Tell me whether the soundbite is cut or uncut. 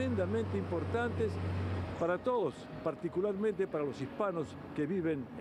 uncut